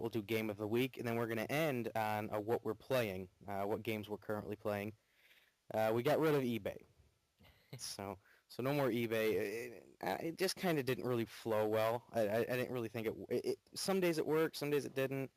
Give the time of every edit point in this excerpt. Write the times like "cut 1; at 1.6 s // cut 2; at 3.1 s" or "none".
cut 1; at 8.8 s